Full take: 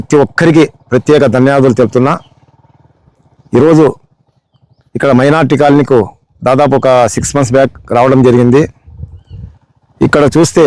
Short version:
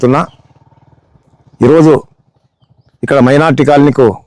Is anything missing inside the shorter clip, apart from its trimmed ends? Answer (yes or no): no